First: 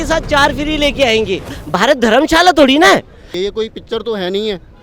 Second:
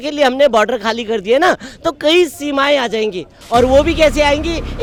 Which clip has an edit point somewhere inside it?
first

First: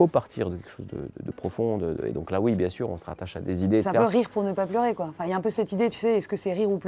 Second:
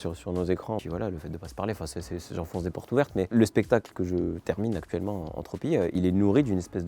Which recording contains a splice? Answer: second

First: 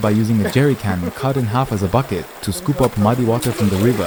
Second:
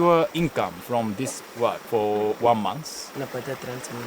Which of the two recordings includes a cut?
second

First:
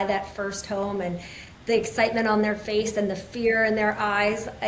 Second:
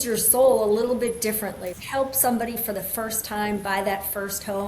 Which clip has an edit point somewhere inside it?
second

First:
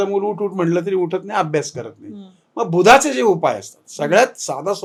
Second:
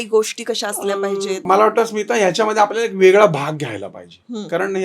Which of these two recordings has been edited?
second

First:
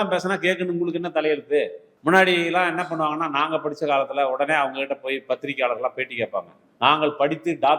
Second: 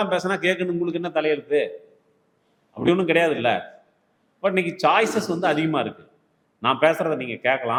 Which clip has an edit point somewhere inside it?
first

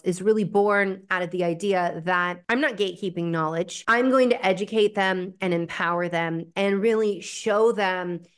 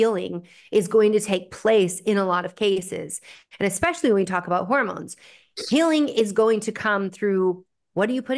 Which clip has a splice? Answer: first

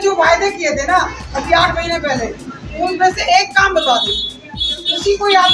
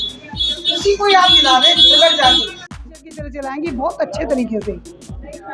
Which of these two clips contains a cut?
second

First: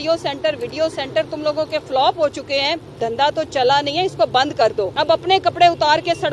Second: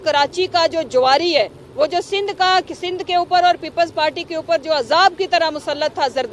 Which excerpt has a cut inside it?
first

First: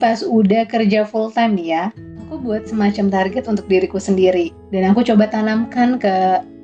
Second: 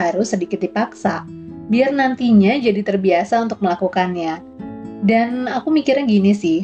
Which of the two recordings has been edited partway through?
first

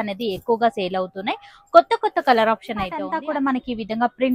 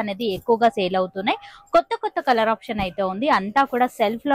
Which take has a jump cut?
first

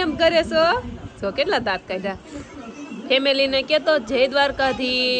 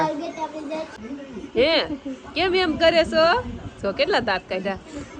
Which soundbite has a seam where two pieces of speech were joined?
second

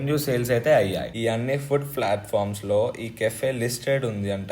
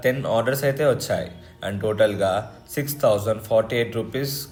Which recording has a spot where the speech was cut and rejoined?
first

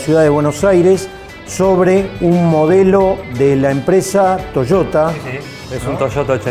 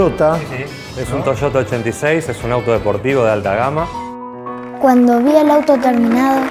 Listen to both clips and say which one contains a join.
second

